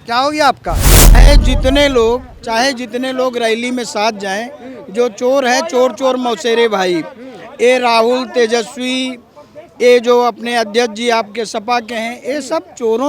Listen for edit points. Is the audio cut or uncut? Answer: cut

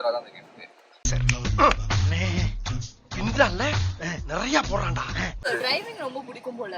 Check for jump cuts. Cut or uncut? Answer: cut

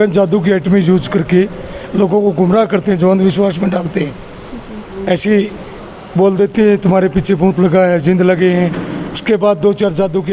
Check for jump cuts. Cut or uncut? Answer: uncut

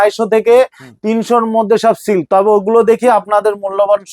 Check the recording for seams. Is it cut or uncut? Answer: uncut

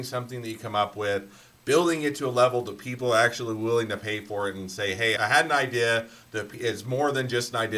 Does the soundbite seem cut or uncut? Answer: cut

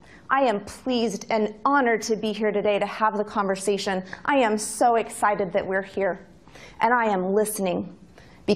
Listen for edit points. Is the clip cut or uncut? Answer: cut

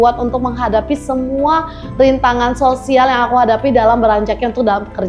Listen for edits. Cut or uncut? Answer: uncut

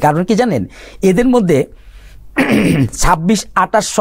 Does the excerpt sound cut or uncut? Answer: uncut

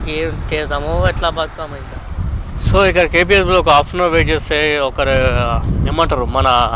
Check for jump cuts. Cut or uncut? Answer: cut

